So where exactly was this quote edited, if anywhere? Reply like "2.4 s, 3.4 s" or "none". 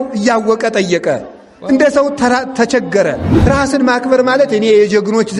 3.3 s